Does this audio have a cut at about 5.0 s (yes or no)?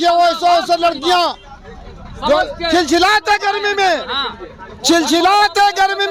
no